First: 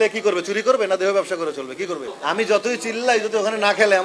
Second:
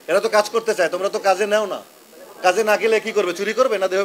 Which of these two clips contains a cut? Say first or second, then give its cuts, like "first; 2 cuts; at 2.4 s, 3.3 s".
first; 1 cut; at 2.1 s